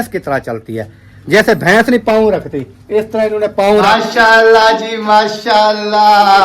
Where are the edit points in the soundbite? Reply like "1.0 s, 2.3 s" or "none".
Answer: 3.9 s